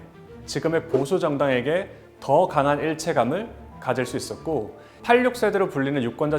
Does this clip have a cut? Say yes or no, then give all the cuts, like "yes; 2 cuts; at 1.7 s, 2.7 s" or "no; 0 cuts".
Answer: yes; 1 cut; at 4.9 s